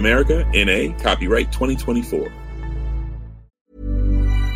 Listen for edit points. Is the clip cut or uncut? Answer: cut